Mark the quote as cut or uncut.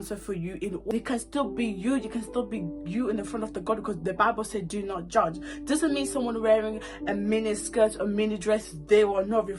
cut